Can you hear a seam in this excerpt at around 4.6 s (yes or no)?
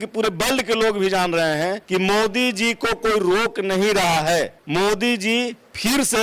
yes